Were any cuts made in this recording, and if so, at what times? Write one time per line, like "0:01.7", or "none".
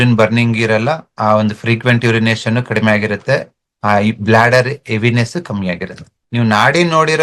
0:06.1

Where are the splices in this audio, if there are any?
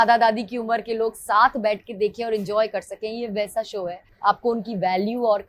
0:04.0

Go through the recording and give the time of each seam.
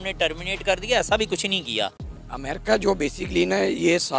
0:02.0

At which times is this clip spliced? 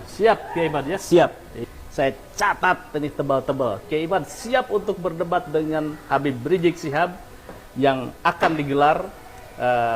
0:01.5

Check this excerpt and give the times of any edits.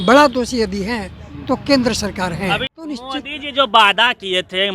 0:02.7

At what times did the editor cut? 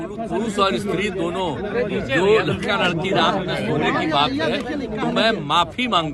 none

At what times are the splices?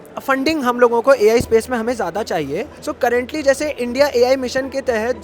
0:02.8

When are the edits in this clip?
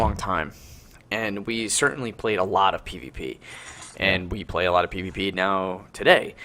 0:01.1

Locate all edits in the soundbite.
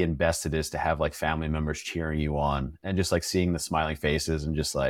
none

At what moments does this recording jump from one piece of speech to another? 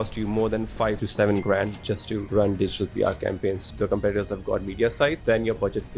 0:01.0
0:02.2
0:03.6
0:05.2

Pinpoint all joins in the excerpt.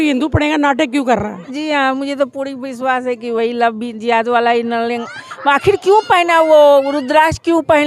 none

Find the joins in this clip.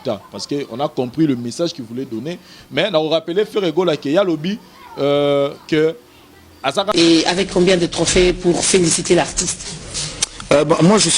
0:06.9

